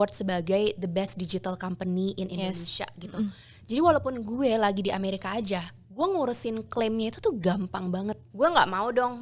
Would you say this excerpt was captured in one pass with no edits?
no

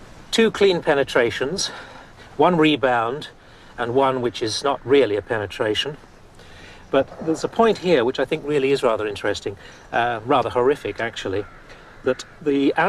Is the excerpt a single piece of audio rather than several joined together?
no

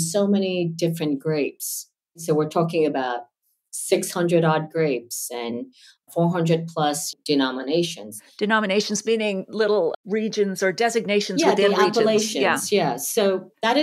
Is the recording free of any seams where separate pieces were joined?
no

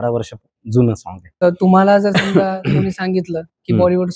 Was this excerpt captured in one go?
no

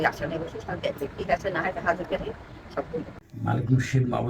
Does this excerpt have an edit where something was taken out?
yes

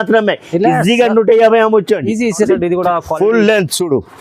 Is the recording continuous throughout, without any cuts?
no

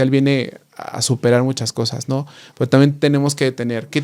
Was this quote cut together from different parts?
no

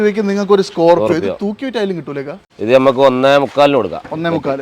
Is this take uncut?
no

